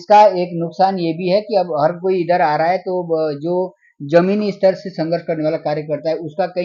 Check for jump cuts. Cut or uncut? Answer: uncut